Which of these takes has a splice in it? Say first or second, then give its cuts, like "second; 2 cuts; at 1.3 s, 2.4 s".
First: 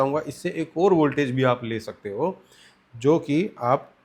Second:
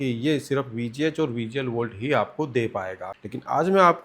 second; 1 cut; at 3.0 s